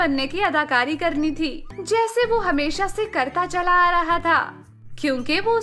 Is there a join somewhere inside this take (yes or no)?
no